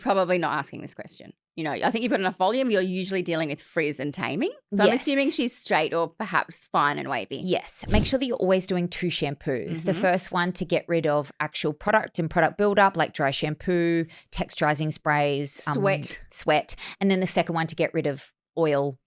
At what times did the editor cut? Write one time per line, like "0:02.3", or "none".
0:07.9